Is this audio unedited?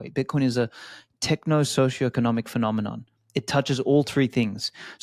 yes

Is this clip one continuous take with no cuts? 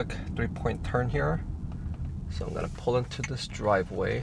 yes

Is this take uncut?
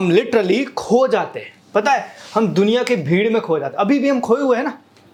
yes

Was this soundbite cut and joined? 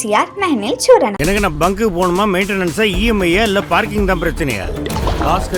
no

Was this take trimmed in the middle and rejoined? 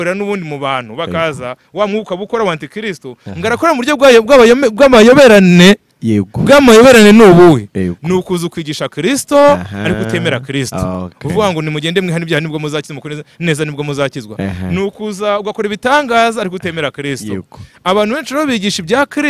no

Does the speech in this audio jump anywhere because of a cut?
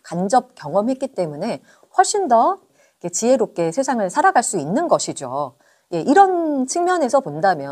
no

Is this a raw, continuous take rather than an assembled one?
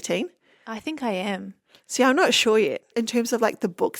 no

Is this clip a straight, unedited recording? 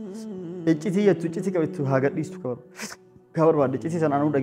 yes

